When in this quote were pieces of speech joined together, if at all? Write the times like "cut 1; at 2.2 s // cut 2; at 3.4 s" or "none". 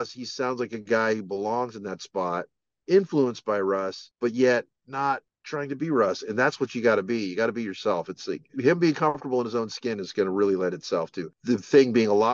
cut 1; at 4.0 s // cut 2; at 5.4 s // cut 3; at 8.6 s // cut 4; at 11.3 s